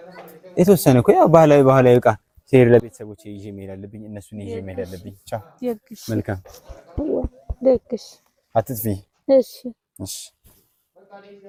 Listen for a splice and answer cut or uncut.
uncut